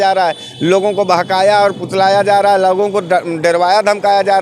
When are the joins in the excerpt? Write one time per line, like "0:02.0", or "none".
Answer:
none